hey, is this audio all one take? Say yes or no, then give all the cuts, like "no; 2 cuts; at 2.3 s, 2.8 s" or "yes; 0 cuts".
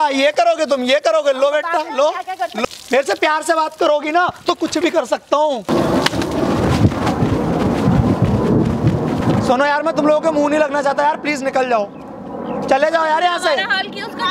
no; 3 cuts; at 2.6 s, 5.7 s, 9.2 s